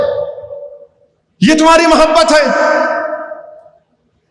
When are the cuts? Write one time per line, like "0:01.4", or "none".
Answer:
none